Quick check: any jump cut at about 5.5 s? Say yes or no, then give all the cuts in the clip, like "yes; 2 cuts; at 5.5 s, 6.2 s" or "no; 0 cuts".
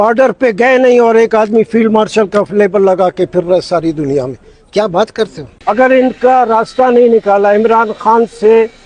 no; 0 cuts